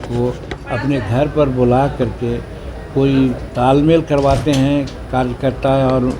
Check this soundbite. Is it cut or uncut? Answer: uncut